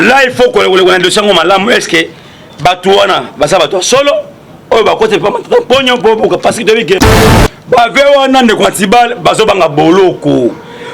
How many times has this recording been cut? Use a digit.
1